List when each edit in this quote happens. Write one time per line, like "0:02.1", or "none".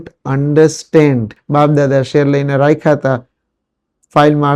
0:01.4